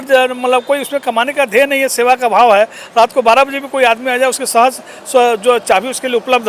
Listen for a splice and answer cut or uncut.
uncut